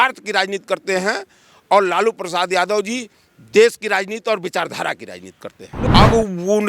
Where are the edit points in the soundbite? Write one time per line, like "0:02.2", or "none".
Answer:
0:05.7